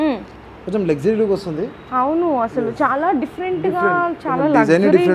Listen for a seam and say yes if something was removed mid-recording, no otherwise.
no